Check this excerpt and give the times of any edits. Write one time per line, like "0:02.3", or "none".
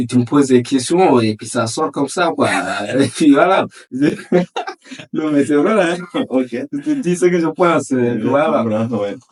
none